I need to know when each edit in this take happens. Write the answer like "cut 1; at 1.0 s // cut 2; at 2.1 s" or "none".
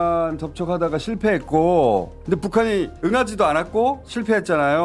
cut 1; at 2.2 s